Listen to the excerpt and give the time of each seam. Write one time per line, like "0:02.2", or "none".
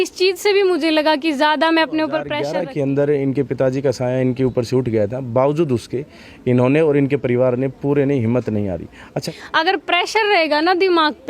0:02.4
0:09.2